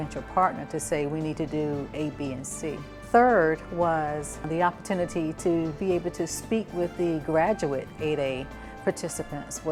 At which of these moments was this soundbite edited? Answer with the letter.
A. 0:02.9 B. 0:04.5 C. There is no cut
C